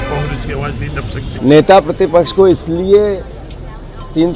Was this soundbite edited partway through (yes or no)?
yes